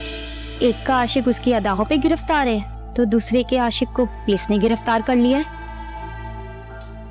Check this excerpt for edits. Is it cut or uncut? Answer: uncut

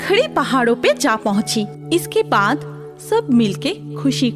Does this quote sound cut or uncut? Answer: cut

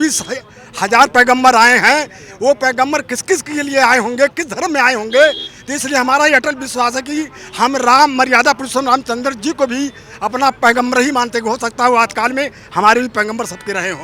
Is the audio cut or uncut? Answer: uncut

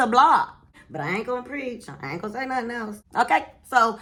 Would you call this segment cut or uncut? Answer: uncut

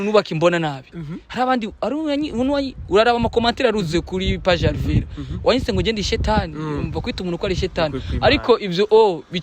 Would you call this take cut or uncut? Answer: uncut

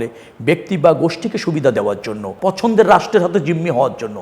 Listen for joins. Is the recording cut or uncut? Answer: cut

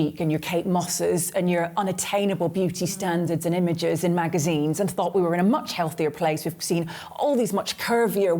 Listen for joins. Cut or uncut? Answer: uncut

